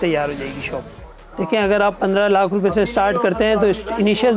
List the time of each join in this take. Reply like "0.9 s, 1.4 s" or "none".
none